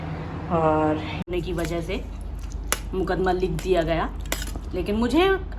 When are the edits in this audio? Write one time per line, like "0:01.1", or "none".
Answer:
0:01.2